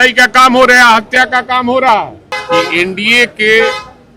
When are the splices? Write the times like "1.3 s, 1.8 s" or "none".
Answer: 2.3 s